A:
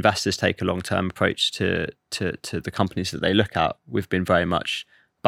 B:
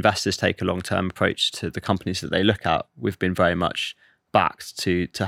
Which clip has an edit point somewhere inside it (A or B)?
B